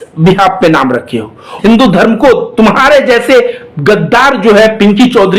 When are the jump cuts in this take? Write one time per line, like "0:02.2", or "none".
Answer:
0:01.5